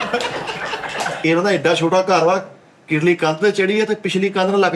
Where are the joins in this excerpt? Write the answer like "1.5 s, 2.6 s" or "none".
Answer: 1.1 s